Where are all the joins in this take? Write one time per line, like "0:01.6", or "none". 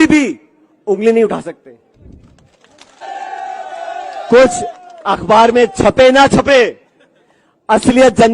0:03.0